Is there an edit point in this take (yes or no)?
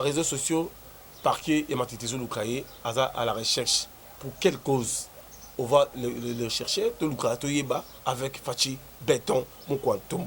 yes